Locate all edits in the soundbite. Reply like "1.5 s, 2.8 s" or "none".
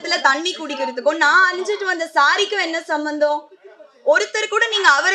none